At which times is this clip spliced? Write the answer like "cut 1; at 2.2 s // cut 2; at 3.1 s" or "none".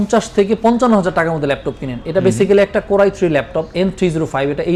none